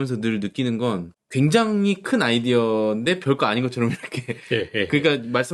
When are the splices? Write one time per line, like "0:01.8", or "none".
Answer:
0:01.2